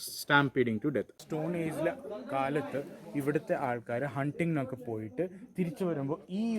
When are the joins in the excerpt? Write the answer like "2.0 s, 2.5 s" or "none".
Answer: 1.1 s